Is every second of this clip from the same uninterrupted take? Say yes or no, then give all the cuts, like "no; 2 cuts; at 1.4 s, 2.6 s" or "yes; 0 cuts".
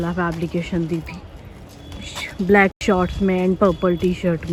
yes; 0 cuts